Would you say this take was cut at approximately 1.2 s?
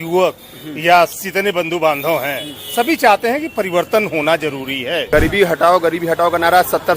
yes; 2 cuts; at 1.2 s, 5.1 s

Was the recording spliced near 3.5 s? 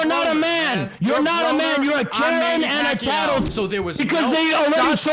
yes; 1 cut; at 3.5 s

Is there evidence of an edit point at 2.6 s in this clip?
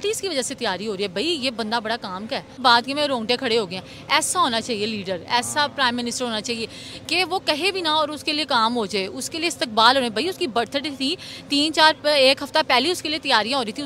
yes; 1 cut; at 2.6 s

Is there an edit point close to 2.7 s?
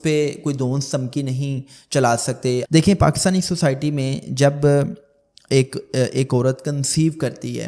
yes; 1 cut; at 2.7 s

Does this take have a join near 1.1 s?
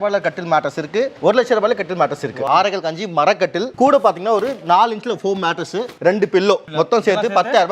yes; 4 cuts; at 1.1 s, 2.4 s, 5.9 s, 6.7 s

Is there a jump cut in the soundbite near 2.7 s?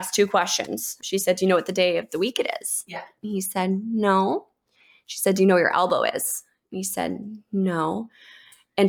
no; 1 cut; at 0.9 s

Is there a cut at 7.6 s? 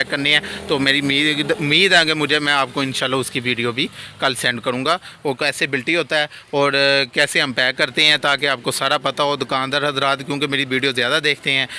no; 0 cuts

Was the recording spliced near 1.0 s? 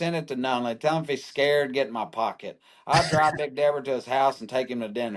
no; 0 cuts

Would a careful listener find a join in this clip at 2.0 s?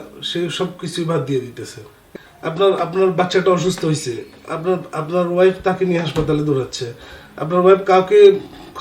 yes; 1 cut; at 2.0 s

